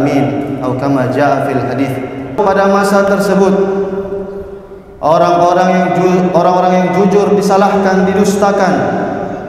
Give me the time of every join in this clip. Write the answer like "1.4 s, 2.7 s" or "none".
2.4 s